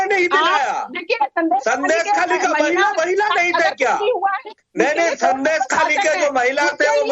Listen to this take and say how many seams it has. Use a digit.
1